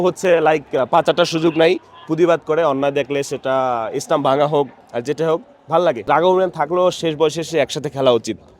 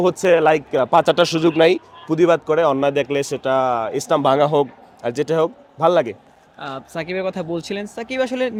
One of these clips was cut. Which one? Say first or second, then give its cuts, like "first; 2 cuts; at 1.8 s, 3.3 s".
first; 2 cuts; at 4.8 s, 6.0 s